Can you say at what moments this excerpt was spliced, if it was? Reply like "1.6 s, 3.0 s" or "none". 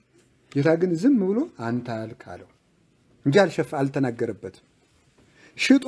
none